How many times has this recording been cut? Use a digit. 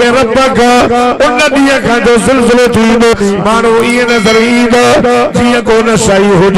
1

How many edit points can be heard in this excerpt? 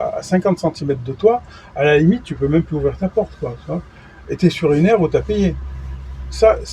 0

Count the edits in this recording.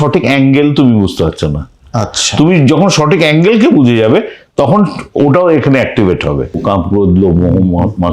1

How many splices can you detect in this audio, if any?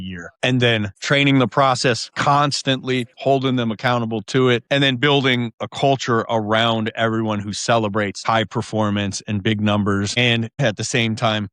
4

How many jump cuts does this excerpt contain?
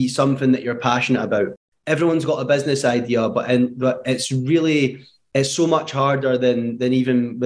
0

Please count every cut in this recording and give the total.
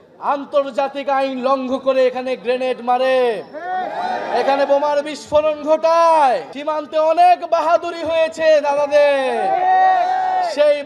1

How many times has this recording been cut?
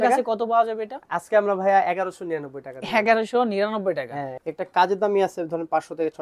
1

